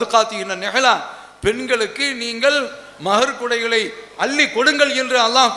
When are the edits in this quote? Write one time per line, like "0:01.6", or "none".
none